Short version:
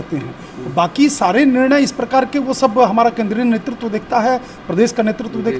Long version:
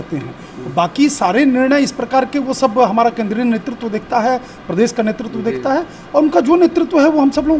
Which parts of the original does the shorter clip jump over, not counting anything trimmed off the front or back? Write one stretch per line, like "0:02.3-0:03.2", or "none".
none